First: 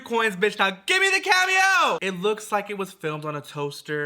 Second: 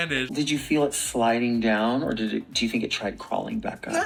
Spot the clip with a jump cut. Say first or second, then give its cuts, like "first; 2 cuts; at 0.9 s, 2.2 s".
first; 1 cut; at 2.0 s